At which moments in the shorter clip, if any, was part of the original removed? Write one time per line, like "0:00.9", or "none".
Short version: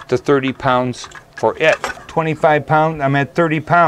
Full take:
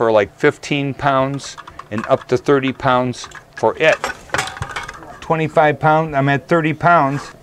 0:02.0